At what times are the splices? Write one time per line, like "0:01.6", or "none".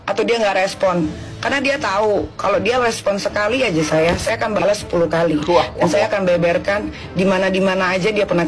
none